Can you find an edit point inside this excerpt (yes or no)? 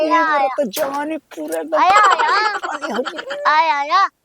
yes